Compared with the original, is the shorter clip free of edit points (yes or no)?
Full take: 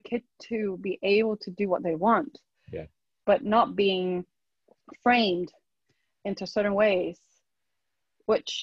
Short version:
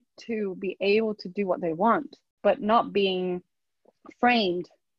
no